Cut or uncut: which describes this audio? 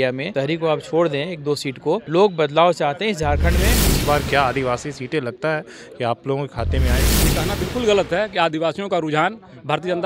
cut